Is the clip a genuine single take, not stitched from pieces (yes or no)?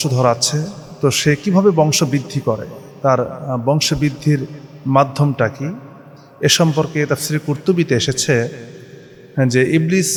yes